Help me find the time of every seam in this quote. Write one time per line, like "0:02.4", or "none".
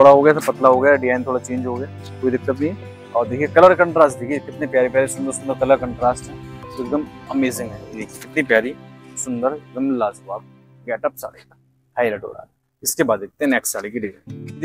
none